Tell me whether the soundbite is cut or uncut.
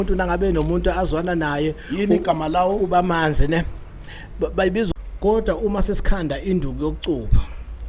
cut